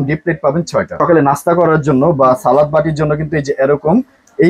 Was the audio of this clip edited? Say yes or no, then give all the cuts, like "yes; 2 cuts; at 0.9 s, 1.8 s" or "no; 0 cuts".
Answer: yes; 1 cut; at 1.0 s